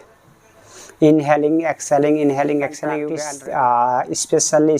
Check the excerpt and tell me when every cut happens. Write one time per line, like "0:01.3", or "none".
0:03.1